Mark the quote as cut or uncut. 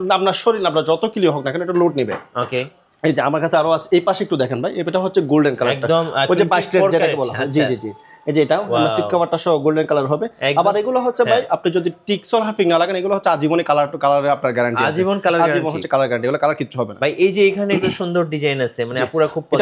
uncut